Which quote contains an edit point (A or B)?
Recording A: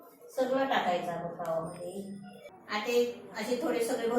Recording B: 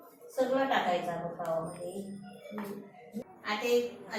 A